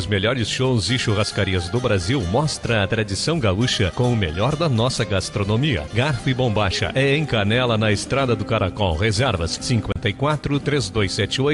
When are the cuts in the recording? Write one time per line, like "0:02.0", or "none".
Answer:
none